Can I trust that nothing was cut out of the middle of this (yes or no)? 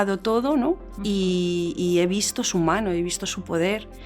yes